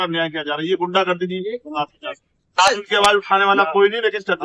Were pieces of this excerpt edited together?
yes; 1 cut; at 2.6 s

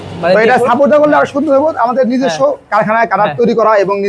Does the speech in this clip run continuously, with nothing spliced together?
yes; 0 cuts

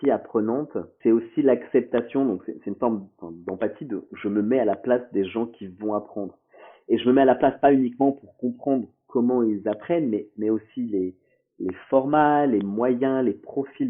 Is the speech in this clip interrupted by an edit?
yes; 1 cut; at 0.9 s

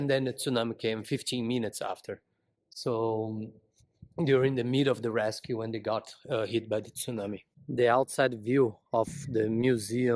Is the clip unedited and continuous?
yes; 0 cuts

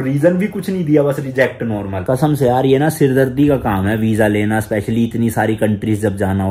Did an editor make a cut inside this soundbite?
yes; 1 cut; at 2.0 s

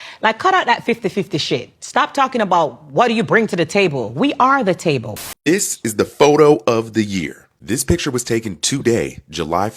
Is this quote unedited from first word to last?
no; 1 cut; at 5.3 s

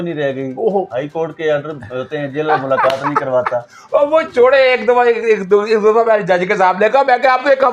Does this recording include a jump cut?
no; 0 cuts

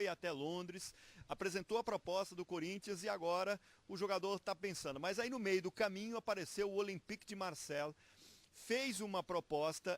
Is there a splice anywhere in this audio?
yes; 1 cut; at 1.1 s

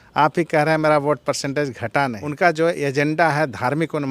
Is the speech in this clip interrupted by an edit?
yes; 1 cut; at 2.2 s

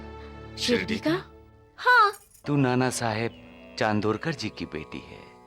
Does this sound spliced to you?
yes; 1 cut; at 2.3 s

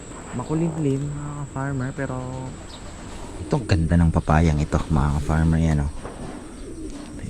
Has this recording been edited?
yes; 1 cut; at 3.3 s

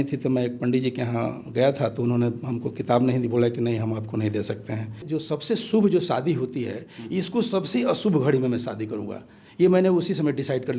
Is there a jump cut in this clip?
yes; 1 cut; at 5.0 s

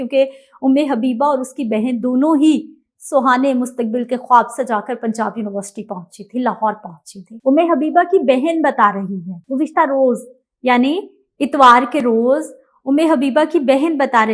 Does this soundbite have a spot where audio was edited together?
no; 0 cuts

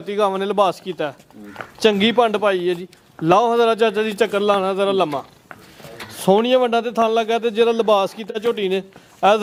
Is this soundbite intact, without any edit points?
yes; 0 cuts

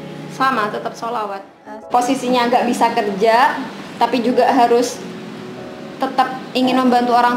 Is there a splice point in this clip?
yes; 1 cut; at 1.6 s

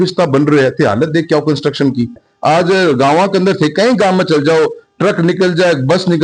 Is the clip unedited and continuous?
no; 1 cut; at 2.2 s

